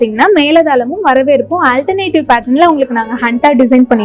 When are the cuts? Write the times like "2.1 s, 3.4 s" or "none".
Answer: none